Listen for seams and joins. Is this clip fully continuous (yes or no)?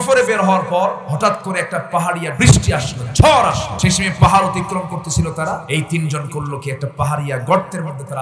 no